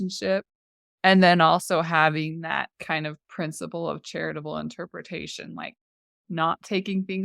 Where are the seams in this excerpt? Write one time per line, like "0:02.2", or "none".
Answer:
none